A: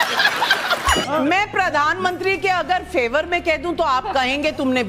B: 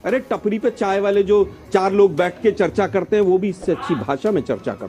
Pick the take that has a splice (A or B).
A